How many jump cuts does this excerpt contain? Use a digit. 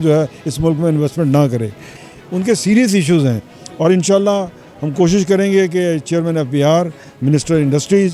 1